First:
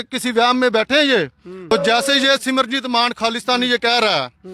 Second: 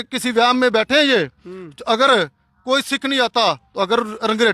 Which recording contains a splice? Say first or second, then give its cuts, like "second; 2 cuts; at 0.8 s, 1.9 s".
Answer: first; 1 cut; at 1.7 s